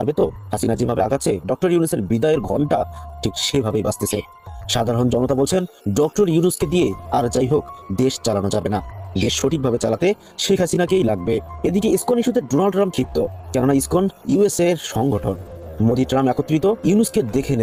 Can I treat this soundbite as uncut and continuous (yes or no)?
yes